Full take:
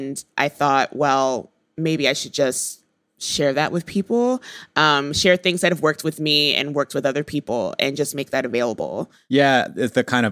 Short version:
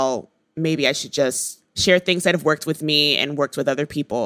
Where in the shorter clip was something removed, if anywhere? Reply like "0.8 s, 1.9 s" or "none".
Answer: 1.7 s